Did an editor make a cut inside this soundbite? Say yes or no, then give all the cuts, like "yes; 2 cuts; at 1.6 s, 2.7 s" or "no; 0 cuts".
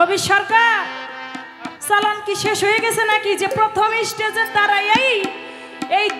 no; 0 cuts